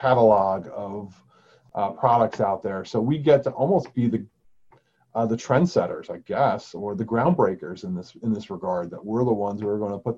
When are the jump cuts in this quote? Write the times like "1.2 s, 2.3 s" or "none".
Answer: 1.5 s